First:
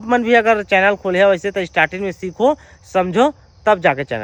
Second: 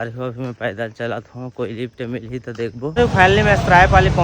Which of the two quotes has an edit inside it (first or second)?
second